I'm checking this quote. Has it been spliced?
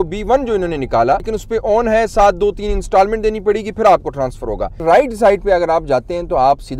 yes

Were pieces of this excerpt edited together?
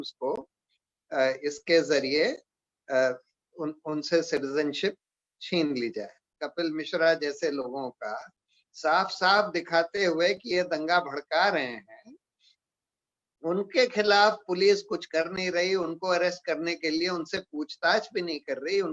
yes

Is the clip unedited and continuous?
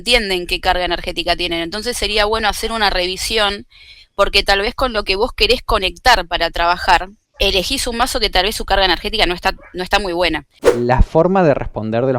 no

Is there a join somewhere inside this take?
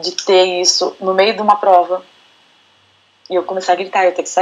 no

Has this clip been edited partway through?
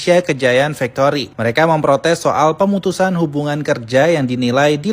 no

